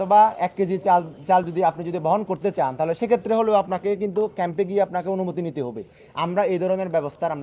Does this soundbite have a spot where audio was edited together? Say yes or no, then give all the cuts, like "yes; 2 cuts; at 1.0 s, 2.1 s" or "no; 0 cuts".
no; 0 cuts